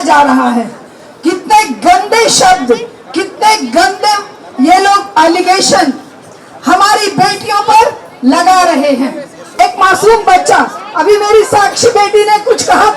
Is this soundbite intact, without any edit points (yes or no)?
no